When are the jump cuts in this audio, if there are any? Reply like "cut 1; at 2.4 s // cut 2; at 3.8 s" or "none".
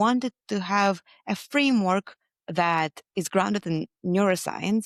none